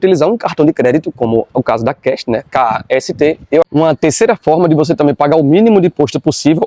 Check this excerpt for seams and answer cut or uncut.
cut